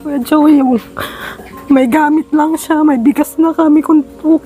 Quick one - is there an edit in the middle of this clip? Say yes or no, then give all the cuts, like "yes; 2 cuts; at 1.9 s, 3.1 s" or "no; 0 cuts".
no; 0 cuts